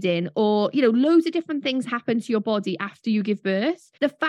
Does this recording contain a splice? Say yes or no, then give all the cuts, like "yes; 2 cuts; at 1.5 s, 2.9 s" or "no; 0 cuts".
no; 0 cuts